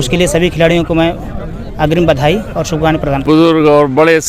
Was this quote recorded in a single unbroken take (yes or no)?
no